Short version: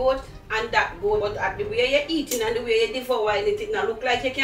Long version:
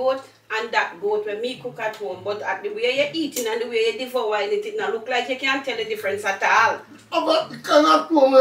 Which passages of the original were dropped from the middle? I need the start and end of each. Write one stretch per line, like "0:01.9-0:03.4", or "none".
0:01.2-0:02.3

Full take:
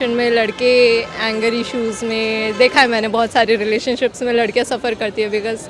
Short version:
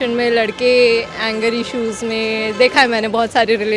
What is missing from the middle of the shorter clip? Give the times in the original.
none

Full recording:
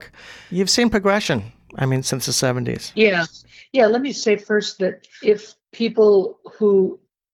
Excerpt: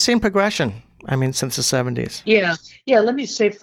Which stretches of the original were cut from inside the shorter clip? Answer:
0:03.4-0:03.5

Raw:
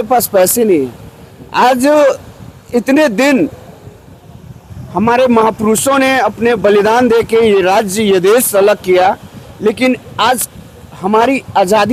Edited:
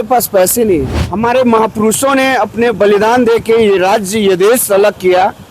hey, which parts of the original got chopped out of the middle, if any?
0:01.0-0:04.8

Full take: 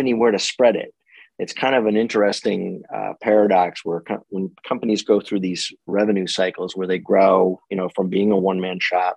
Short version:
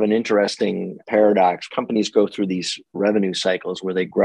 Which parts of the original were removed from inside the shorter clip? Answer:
0:02.8-0:03.1
0:03.8-0:04.6

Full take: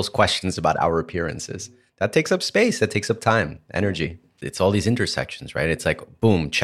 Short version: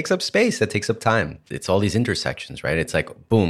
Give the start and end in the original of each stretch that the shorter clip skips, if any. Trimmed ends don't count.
0:03.6-0:04.3

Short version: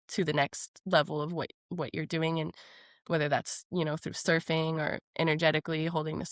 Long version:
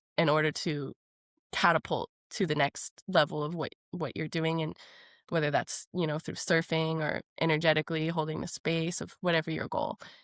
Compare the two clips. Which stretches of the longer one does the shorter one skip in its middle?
none

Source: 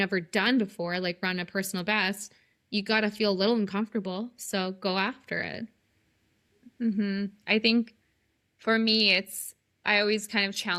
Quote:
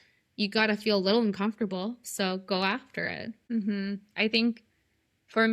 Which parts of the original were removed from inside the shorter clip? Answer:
0:05.7-0:06.6

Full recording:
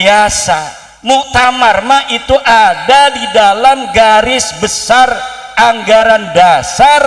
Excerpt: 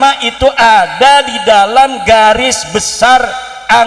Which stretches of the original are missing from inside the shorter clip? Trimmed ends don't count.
none

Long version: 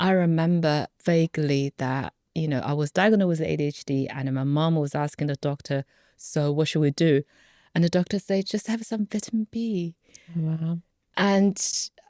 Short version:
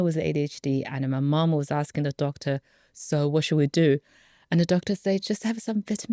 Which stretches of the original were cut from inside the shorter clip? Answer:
none

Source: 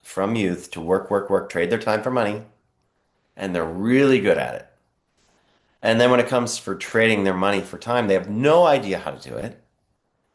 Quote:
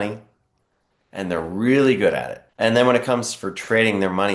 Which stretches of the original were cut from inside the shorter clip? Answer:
0:04.6-0:05.6

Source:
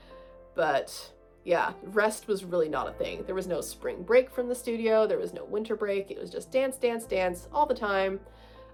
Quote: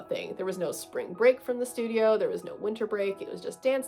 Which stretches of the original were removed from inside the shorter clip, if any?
none

